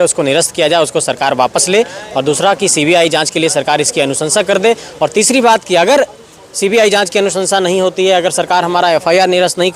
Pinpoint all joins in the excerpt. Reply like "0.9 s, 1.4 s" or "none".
none